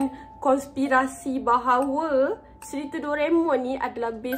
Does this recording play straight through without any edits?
yes; 0 cuts

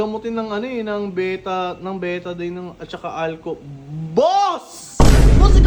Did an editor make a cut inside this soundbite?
no; 0 cuts

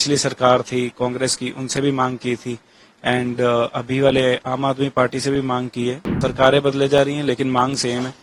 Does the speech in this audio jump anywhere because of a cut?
yes; 1 cut; at 6.1 s

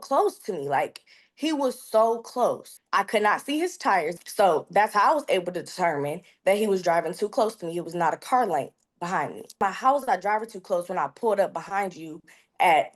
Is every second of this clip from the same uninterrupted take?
no; 3 cuts; at 2.7 s, 4.2 s, 9.6 s

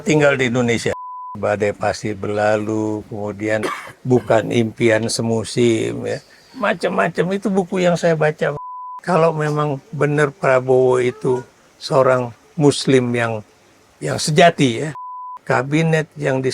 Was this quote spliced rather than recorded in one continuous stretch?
yes; 3 cuts; at 1.3 s, 8.6 s, 15.1 s

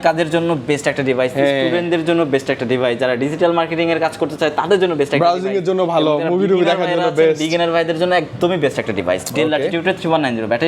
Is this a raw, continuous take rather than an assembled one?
yes; 0 cuts

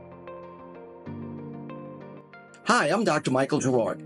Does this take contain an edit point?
yes; 1 cut; at 2.2 s

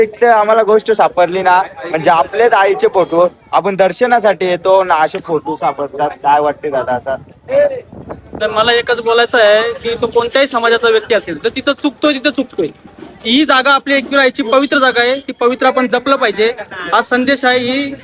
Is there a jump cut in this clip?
no; 0 cuts

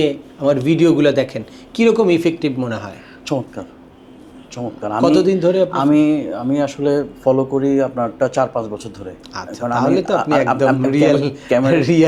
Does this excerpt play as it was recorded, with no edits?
yes; 0 cuts

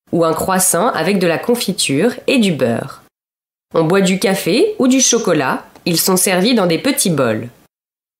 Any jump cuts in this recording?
no; 0 cuts

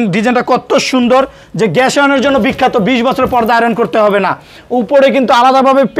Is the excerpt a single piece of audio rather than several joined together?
yes; 0 cuts

